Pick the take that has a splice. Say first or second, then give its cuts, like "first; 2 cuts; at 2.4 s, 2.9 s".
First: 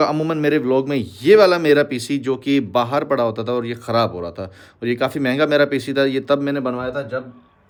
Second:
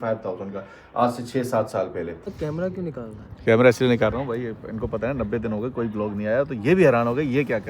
second; 1 cut; at 2.4 s